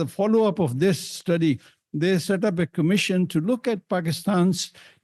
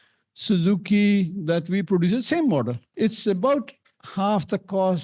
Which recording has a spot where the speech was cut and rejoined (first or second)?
second